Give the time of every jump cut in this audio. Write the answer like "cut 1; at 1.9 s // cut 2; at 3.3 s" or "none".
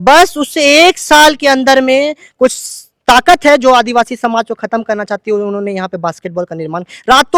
none